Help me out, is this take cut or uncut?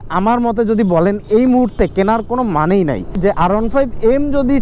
cut